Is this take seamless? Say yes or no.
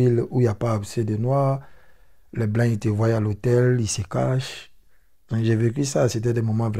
yes